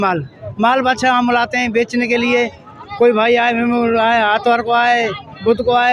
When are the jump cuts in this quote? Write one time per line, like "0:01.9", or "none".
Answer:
none